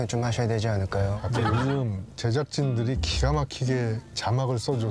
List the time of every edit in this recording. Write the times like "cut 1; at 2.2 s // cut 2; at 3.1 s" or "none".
cut 1; at 1.3 s